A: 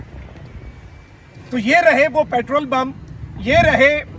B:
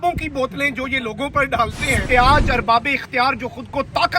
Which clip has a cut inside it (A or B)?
B